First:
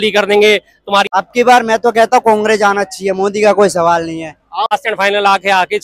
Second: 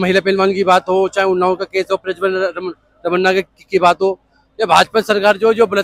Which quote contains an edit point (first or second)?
first